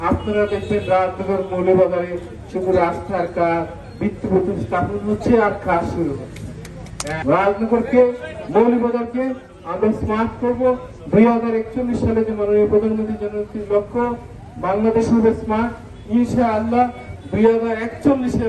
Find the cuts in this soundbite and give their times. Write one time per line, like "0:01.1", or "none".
0:07.0

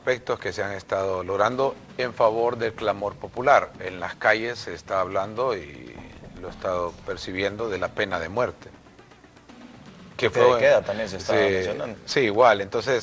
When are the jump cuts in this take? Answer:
none

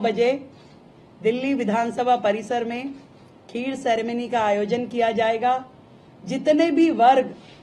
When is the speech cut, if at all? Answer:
none

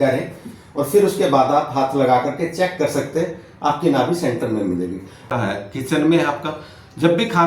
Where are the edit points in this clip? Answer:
0:05.2

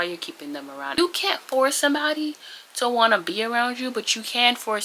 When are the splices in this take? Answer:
0:01.0

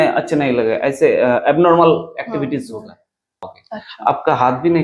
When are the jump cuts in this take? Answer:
0:03.5

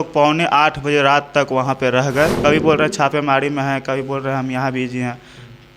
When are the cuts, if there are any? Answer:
0:02.4

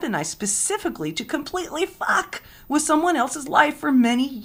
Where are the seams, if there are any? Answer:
none

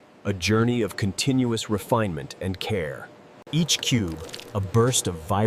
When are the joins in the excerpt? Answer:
0:03.3

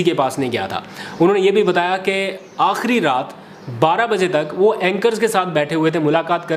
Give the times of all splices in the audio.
none

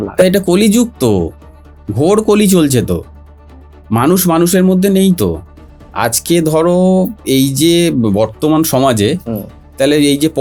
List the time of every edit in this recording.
none

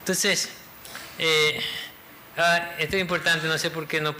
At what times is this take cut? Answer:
none

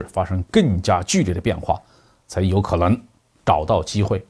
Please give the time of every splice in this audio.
none

